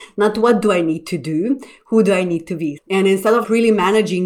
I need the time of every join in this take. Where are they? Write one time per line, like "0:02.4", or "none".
0:02.7